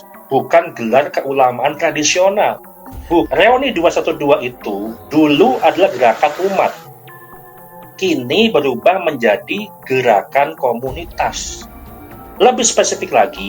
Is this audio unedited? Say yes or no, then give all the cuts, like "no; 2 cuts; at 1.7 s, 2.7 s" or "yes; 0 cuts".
no; 1 cut; at 3.3 s